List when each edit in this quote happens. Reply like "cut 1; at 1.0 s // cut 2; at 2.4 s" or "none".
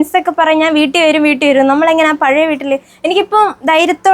none